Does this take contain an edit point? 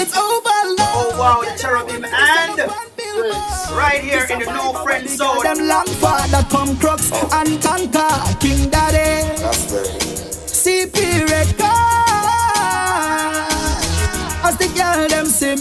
no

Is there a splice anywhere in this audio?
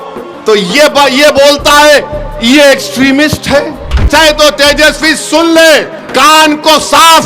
yes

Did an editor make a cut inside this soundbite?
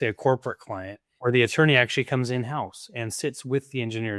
yes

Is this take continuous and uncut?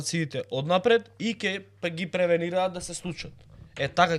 yes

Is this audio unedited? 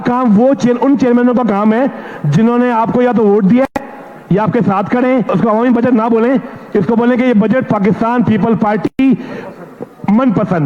no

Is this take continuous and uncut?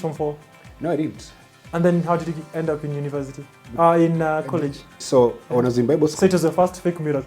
yes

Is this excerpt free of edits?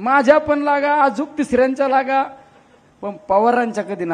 yes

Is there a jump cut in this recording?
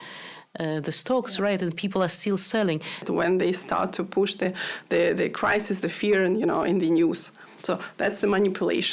yes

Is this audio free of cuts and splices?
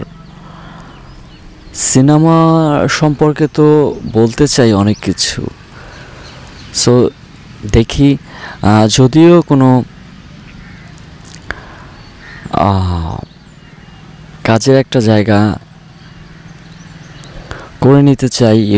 yes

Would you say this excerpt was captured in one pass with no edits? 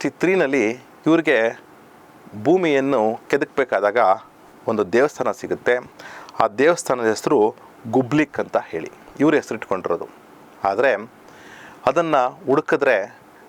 yes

